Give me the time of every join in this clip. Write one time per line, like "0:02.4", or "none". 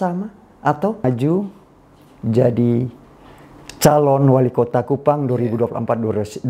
0:01.0

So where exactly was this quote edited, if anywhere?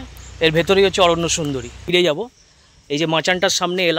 0:01.8

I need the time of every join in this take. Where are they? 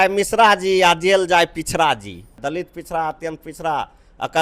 0:02.4

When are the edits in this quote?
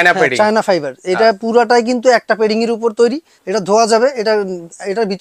0:03.3

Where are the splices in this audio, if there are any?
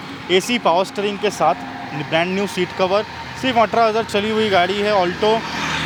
none

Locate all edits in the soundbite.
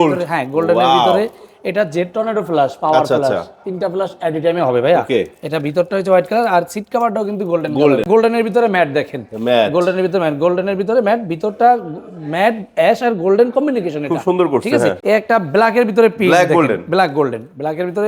0:08.1
0:15.0

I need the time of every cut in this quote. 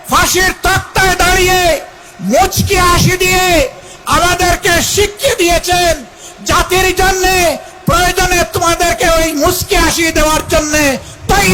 none

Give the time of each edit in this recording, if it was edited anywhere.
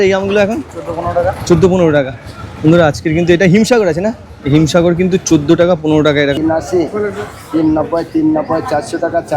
0:06.4

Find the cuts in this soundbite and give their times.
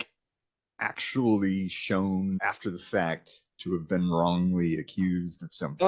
0:02.4

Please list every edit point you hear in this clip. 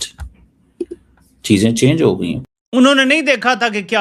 0:02.5

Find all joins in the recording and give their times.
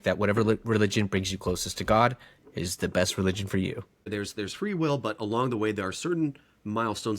0:04.1

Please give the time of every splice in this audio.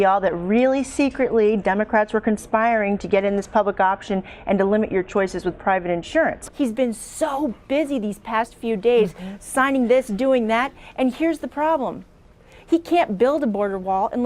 0:06.4

